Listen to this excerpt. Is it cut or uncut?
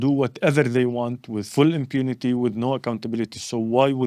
uncut